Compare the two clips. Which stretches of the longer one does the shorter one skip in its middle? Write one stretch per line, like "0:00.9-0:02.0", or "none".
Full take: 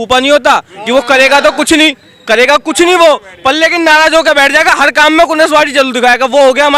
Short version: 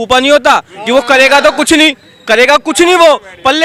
none